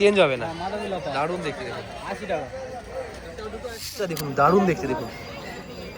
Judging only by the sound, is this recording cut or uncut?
cut